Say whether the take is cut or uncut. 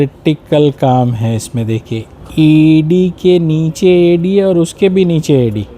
uncut